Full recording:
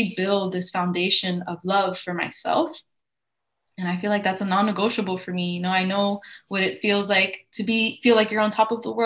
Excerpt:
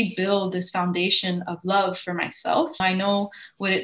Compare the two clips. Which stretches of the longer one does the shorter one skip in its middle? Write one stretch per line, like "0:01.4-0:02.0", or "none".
0:02.8-0:05.7